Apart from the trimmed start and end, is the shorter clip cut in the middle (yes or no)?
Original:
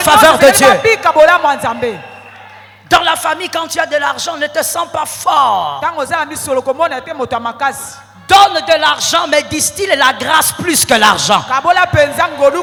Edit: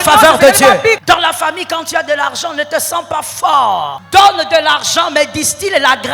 yes